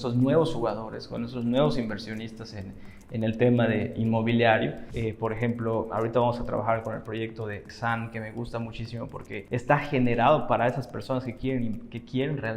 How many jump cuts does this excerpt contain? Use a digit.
3